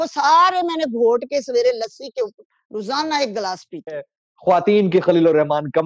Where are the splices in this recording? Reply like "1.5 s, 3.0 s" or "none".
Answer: 4.1 s